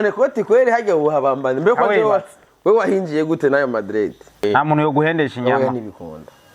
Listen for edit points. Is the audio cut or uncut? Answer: cut